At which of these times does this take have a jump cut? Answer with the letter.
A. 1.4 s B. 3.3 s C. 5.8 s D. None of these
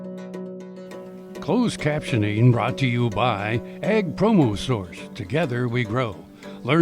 A